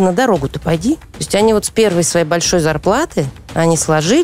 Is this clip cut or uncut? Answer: cut